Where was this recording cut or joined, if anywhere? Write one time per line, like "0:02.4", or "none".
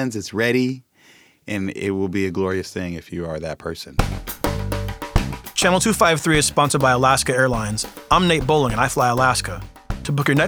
0:03.9